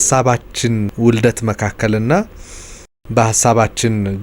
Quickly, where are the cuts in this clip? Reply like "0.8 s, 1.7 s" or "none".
0.9 s

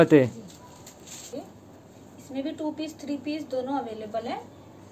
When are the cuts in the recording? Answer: 1.3 s

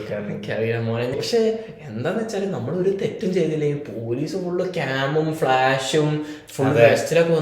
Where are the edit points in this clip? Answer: 1.2 s

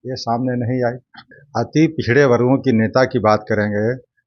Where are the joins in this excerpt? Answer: 1.1 s

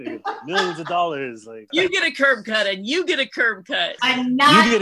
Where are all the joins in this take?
1.7 s, 3.9 s

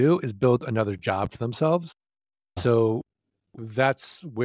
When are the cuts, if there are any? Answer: 2.6 s

